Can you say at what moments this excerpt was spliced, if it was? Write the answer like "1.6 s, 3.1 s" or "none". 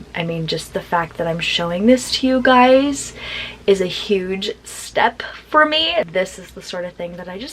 6.0 s

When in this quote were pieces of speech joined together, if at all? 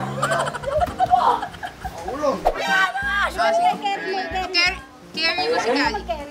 2.5 s

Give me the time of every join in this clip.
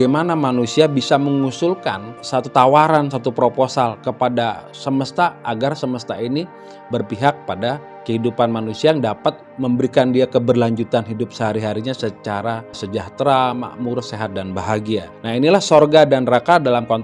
2.2 s, 7.9 s, 9.5 s, 12.8 s, 15.1 s

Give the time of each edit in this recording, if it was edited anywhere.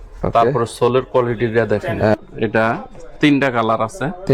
2.1 s

